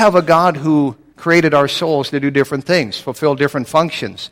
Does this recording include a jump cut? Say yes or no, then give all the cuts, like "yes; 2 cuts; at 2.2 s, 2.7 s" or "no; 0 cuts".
yes; 1 cut; at 1.1 s